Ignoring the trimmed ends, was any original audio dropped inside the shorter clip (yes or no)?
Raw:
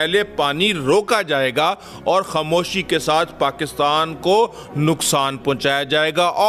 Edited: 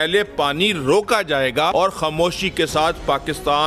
yes